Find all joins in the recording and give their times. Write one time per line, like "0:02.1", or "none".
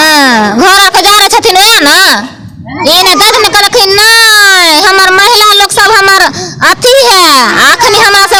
none